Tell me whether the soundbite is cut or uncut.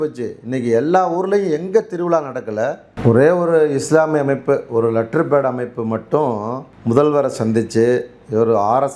cut